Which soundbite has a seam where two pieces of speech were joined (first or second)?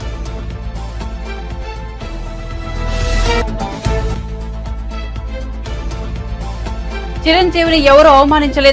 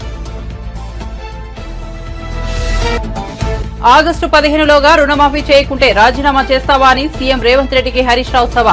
second